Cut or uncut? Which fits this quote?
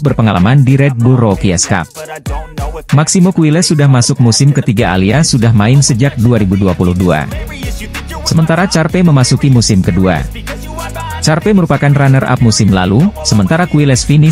uncut